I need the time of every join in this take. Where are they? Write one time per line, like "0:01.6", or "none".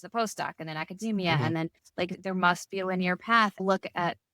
0:02.2
0:03.6